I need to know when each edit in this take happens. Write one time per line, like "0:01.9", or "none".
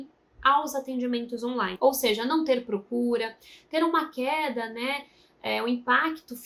none

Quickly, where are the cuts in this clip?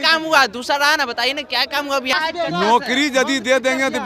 0:02.1

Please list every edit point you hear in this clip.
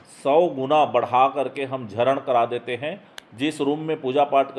none

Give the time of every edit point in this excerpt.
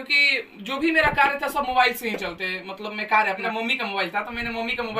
0:03.4

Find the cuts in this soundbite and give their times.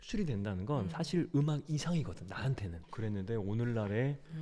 0:02.8

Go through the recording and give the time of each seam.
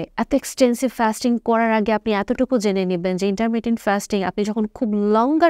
none

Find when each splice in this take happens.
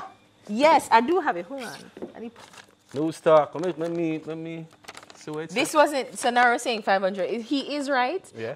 0:02.3

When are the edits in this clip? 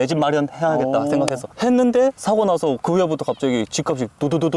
0:01.5
0:02.8

